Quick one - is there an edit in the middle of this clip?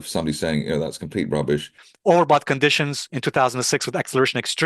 yes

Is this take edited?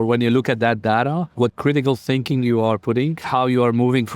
yes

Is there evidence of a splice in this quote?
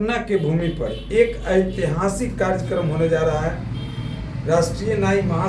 no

